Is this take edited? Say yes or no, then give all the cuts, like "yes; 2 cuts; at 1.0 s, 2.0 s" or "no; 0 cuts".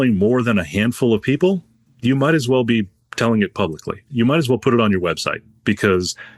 yes; 1 cut; at 4.1 s